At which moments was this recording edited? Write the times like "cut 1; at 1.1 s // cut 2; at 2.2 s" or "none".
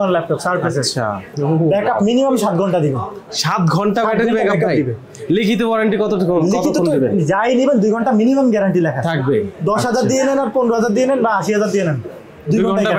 cut 1; at 1.3 s